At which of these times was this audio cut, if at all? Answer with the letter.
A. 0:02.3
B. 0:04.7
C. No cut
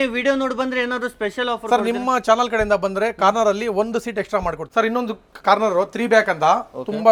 C